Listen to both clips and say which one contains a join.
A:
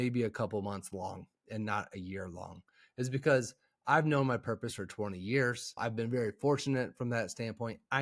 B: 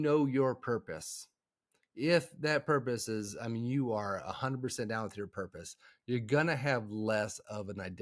A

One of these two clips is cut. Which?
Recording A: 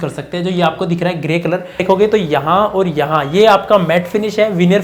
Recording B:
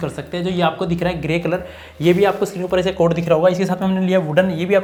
A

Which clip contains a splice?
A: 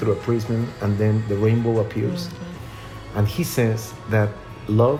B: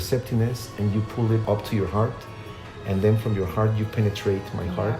B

